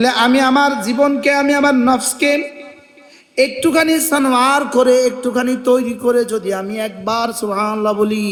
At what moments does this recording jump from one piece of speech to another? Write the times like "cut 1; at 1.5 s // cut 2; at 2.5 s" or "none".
none